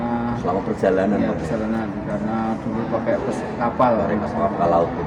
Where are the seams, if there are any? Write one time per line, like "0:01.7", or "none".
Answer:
none